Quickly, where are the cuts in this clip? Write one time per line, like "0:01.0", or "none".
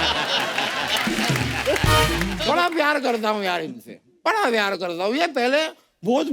0:02.4